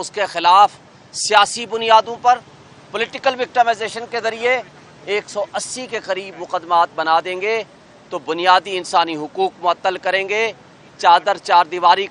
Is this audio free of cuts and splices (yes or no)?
yes